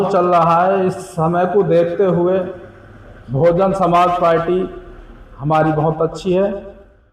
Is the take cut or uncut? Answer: uncut